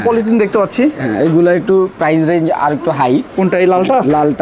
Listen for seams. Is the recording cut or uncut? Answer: uncut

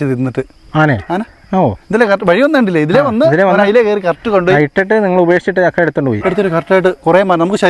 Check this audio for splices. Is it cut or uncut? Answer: uncut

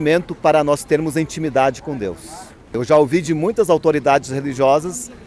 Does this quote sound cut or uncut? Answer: cut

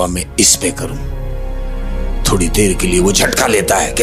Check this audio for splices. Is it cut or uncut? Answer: uncut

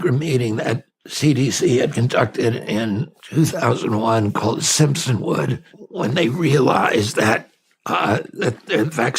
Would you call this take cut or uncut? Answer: cut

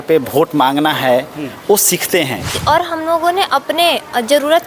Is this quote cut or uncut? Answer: cut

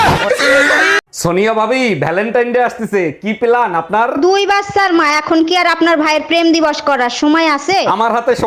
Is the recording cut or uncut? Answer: cut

